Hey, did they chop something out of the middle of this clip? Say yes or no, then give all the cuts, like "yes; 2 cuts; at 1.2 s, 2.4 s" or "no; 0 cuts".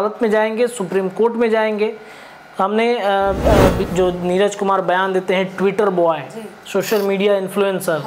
yes; 1 cut; at 3.8 s